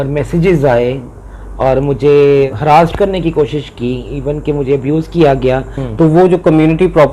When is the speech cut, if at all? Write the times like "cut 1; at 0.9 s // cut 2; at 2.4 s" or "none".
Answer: cut 1; at 2.5 s // cut 2; at 5.8 s